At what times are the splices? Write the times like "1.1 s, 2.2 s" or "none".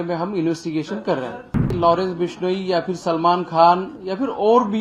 1.7 s